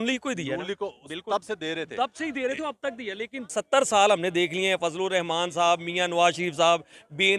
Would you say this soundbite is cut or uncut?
cut